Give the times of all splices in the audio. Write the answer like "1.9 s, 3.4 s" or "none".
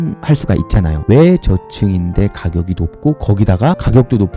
none